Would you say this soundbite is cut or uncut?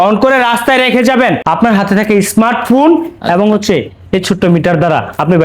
cut